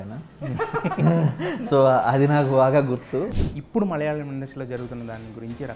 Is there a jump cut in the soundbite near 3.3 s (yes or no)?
yes